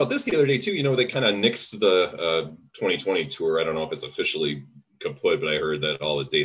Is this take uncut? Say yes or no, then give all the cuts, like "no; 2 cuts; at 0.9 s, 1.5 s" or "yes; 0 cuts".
yes; 0 cuts